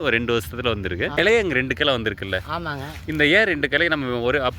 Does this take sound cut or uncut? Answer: cut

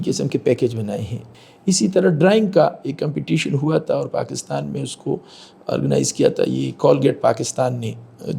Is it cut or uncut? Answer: cut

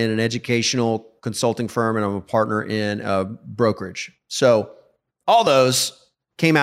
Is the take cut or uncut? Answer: uncut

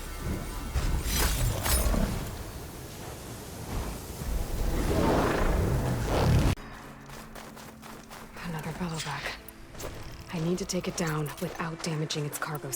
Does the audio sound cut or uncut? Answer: cut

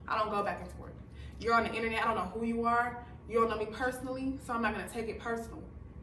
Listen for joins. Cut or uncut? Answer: uncut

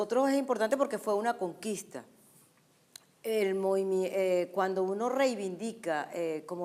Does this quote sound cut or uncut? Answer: cut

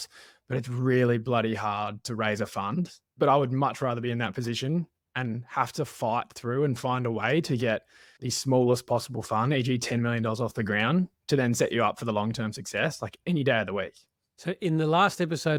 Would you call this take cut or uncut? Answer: uncut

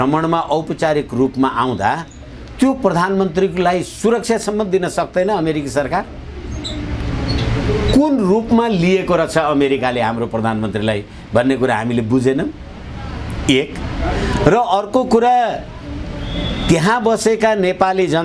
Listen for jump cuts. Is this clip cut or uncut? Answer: uncut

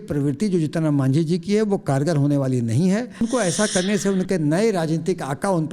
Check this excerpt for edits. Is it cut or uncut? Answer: cut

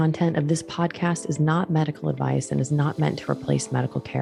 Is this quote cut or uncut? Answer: uncut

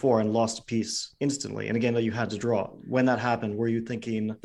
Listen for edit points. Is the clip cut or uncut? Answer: cut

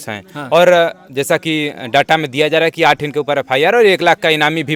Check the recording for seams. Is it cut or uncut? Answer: uncut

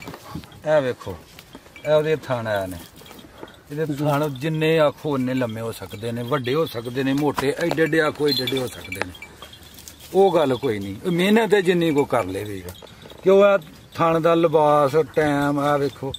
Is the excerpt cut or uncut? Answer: uncut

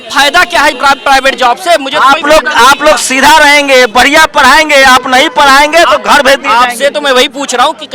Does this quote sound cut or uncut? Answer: uncut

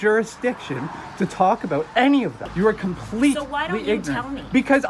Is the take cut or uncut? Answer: cut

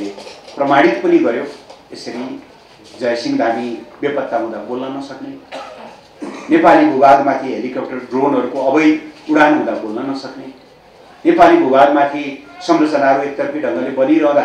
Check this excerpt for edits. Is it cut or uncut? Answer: uncut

